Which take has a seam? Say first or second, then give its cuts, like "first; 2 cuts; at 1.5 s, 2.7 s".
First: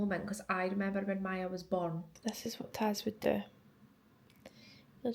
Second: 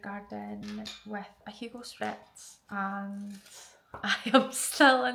first; 1 cut; at 2.1 s